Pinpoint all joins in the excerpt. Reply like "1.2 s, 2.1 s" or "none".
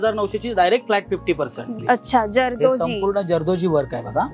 1.7 s